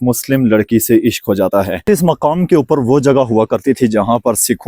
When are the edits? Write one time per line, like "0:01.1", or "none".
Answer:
0:01.8